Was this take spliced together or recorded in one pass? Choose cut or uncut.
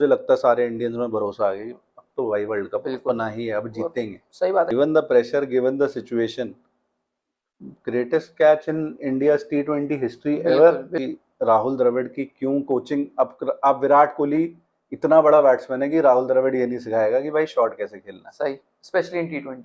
cut